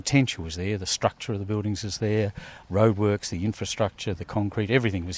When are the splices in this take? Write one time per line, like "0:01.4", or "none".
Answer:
0:02.5